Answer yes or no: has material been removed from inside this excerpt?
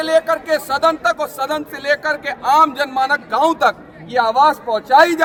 no